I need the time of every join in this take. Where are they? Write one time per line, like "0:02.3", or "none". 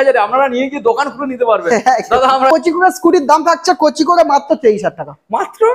0:02.5